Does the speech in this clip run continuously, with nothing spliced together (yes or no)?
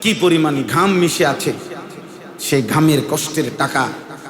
yes